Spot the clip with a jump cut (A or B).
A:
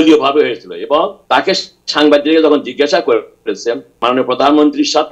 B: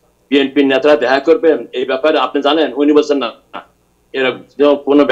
A